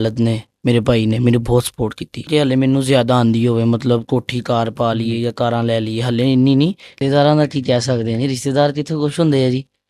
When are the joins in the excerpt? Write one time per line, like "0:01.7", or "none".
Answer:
0:02.3
0:06.9